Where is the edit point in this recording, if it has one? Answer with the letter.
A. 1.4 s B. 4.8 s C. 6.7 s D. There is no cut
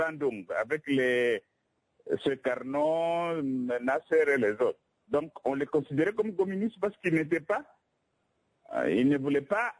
D